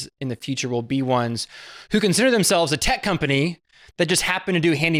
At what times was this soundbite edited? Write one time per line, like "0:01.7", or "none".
none

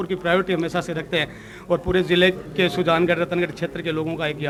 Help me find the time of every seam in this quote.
none

